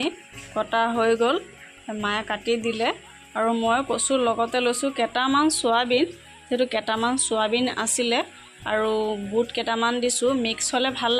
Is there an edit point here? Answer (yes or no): no